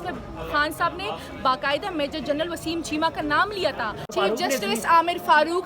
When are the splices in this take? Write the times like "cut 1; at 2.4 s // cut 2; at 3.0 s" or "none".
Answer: cut 1; at 4.1 s